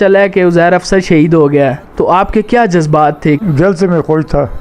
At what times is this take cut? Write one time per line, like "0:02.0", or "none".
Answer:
0:03.5